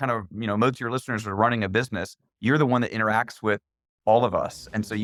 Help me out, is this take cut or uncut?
uncut